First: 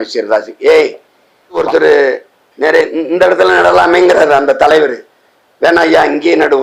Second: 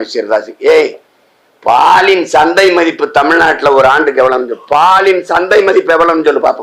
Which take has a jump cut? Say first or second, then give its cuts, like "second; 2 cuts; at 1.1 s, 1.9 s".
first; 1 cut; at 1.6 s